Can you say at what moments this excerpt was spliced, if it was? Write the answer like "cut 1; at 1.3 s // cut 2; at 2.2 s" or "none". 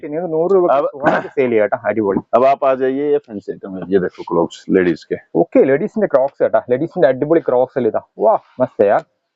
none